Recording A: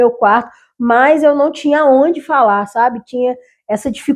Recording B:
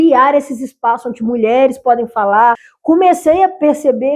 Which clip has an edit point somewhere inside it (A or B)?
B